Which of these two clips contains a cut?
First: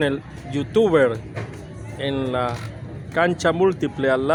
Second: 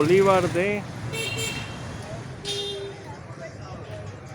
second; 2 cuts; at 0.9 s, 3.0 s

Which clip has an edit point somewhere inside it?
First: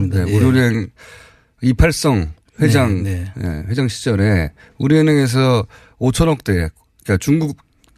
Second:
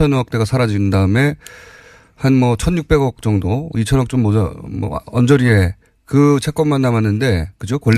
first; 1 cut; at 6.2 s

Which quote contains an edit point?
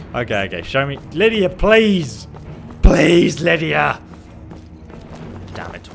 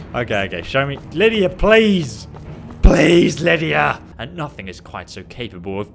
second; 1 cut; at 4.1 s

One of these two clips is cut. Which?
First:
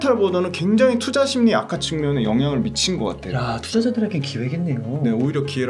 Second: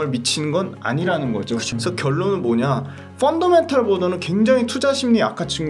second; 1 cut; at 1.7 s

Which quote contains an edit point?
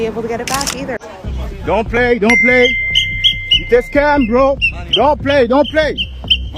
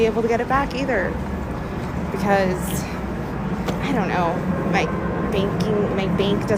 first; 1 cut; at 1.0 s

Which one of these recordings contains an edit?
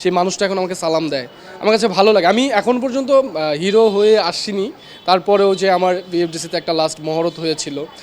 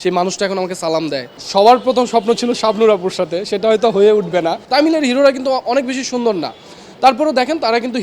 second; 2 cuts; at 1.3 s, 4.6 s

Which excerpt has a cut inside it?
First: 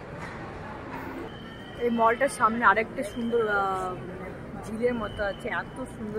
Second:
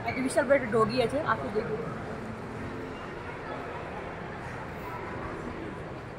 first; 1 cut; at 1.3 s

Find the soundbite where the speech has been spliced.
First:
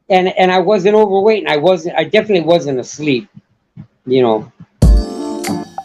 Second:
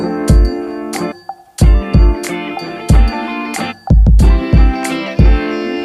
first; 1 cut; at 4.6 s

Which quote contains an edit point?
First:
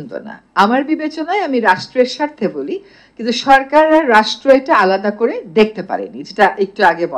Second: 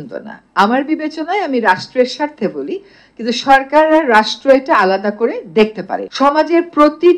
second; 1 cut; at 6.1 s

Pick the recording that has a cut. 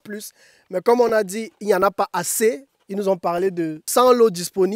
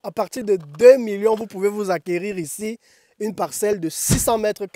first; 1 cut; at 3.8 s

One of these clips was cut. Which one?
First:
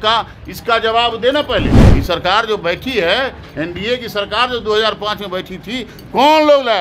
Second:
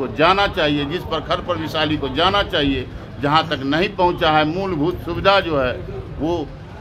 first; 1 cut; at 1.8 s

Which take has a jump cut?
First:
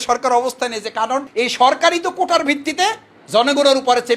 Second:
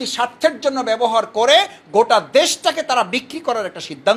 first; 1 cut; at 1.3 s

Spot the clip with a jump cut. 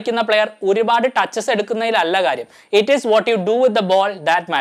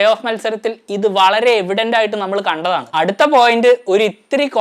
second; 1 cut; at 2.9 s

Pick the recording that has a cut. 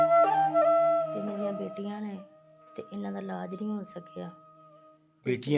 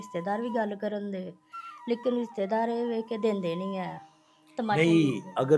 first; 1 cut; at 1.1 s

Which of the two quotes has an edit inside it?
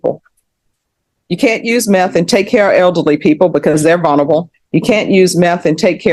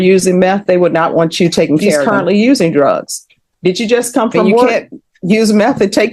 second; 2 cuts; at 2.1 s, 4.7 s

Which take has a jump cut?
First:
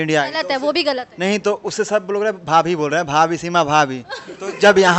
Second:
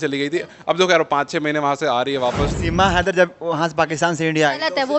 second; 1 cut; at 2.6 s

